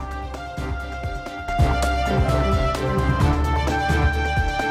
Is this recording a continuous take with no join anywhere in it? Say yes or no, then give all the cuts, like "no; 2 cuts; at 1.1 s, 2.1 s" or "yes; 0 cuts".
no; 1 cut; at 1.3 s